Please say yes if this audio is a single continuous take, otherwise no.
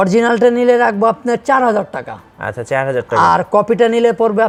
yes